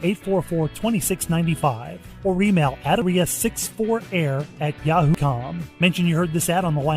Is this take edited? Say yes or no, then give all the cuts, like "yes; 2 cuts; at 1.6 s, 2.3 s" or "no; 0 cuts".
yes; 2 cuts; at 3.0 s, 5.2 s